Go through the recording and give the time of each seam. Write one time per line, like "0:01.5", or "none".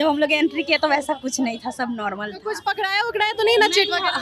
none